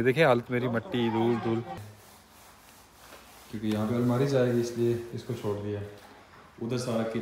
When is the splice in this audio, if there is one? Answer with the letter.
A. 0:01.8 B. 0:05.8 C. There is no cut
A